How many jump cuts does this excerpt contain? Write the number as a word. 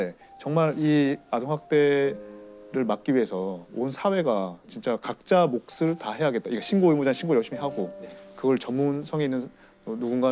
zero